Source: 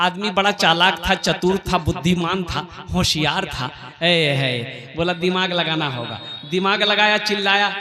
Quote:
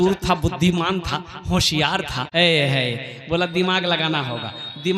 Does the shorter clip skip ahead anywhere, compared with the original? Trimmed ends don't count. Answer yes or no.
yes